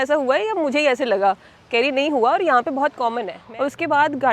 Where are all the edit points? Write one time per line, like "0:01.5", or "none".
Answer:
0:03.3